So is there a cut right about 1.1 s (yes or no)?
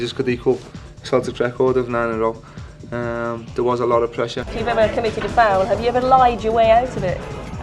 no